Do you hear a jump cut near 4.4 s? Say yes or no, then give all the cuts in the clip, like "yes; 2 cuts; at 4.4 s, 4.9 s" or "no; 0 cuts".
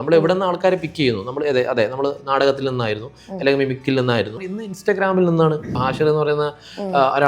yes; 2 cuts; at 4.4 s, 5.8 s